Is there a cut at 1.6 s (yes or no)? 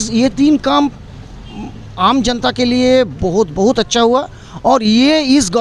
no